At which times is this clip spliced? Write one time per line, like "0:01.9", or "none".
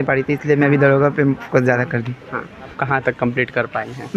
0:02.8